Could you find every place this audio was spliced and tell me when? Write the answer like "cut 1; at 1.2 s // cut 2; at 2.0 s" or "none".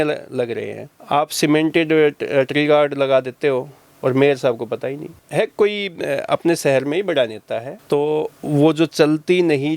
cut 1; at 1.0 s // cut 2; at 5.2 s // cut 3; at 7.7 s